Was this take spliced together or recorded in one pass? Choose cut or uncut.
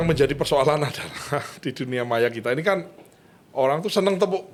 uncut